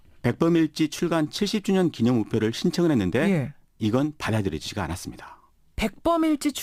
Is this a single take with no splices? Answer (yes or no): yes